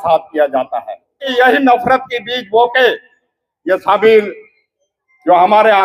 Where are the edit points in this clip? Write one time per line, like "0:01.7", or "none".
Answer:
0:01.2